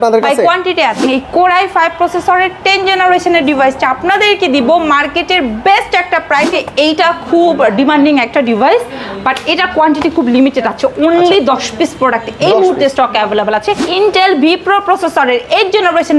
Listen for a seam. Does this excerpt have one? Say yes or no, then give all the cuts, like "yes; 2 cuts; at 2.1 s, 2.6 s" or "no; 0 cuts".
yes; 3 cuts; at 1.1 s, 6.5 s, 13.9 s